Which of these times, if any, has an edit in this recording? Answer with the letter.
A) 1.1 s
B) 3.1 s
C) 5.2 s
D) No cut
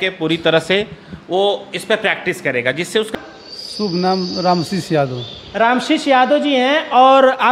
B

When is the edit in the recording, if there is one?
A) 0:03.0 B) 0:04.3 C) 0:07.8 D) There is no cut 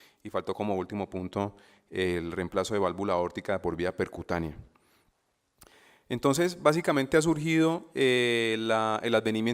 A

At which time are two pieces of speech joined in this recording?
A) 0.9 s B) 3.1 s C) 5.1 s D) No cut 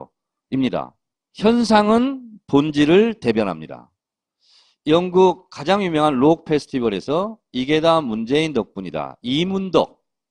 C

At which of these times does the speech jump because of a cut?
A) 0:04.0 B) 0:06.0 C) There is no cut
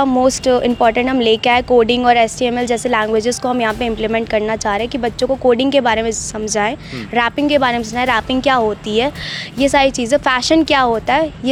C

